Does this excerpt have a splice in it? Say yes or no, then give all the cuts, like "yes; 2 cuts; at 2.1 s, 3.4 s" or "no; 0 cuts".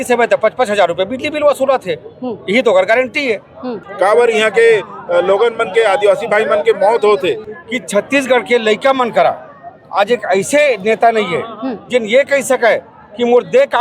yes; 2 cuts; at 3.5 s, 7.5 s